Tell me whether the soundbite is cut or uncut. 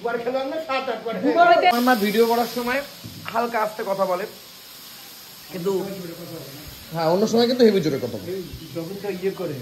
cut